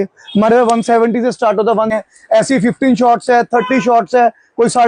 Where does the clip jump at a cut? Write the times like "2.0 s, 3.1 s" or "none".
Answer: 1.9 s